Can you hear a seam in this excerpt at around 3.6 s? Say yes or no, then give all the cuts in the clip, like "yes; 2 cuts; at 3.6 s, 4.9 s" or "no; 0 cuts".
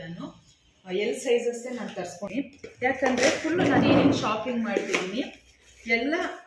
no; 1 cut; at 2.2 s